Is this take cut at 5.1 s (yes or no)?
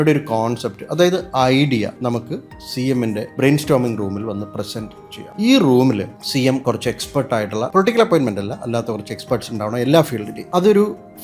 no